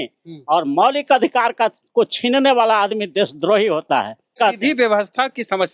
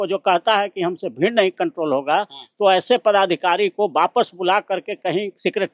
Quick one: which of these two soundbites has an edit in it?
first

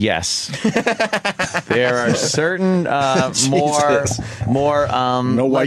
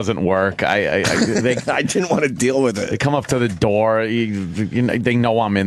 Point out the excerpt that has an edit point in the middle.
first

